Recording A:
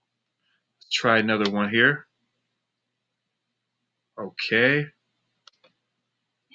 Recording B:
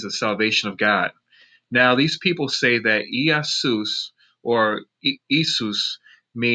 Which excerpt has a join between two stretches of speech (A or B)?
B